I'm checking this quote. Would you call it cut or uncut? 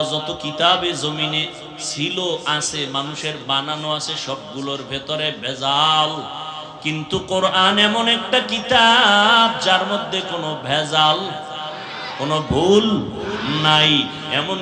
uncut